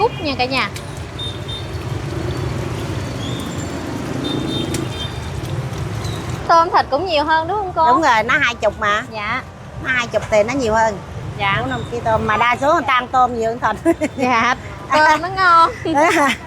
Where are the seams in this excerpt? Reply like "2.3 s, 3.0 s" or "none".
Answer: 6.4 s, 11.1 s